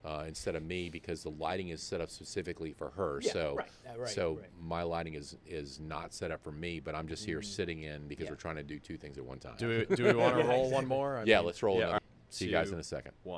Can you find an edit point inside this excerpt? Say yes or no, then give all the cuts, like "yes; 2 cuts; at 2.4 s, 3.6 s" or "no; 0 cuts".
yes; 1 cut; at 12.0 s